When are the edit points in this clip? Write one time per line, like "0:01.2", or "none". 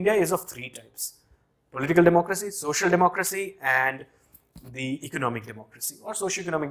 none